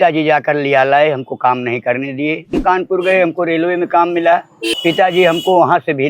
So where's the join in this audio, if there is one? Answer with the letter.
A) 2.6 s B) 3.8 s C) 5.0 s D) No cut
A